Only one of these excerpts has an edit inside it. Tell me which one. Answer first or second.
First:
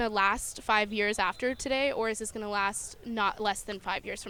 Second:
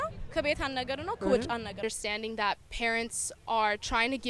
second